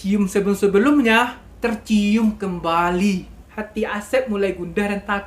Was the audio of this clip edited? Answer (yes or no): yes